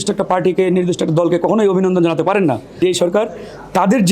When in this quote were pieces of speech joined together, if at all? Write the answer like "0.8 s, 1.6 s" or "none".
2.8 s